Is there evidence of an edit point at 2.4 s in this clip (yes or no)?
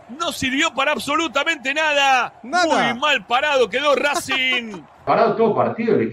no